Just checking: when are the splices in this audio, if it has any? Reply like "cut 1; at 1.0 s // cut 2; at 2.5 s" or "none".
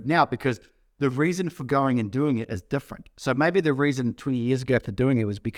none